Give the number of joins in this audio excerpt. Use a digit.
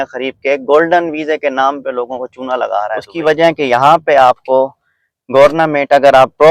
1